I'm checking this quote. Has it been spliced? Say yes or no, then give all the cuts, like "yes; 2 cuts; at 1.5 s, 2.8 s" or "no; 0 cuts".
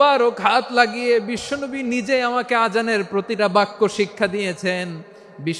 yes; 1 cut; at 3.4 s